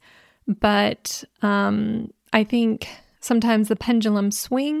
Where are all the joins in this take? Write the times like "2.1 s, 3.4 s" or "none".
3.8 s

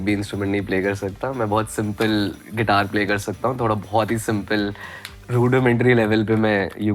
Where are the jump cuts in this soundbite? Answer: none

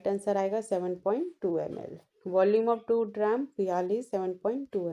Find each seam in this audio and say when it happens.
none

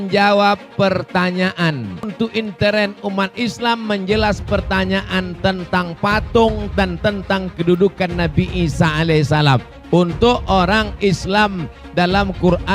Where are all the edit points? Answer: 2.1 s

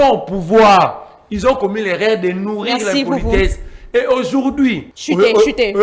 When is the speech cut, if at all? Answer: 4.9 s

